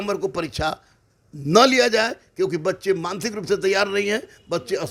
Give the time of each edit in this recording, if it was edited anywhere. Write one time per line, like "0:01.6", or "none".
none